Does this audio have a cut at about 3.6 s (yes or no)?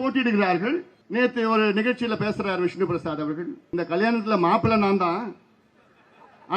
yes